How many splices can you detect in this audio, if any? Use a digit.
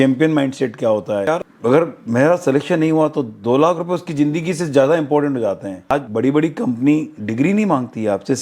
2